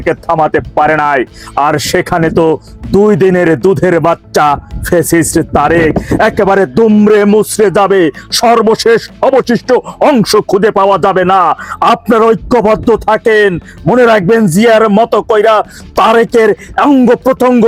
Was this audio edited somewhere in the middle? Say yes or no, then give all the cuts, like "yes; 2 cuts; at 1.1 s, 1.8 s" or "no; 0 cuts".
no; 0 cuts